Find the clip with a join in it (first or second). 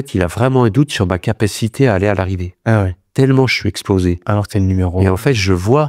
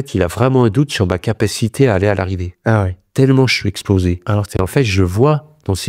second